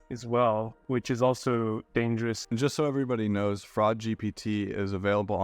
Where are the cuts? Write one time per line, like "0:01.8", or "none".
0:02.4